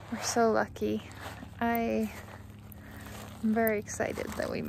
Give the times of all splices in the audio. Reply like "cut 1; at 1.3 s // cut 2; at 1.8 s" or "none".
none